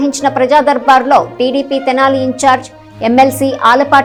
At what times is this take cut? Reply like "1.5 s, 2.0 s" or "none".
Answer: none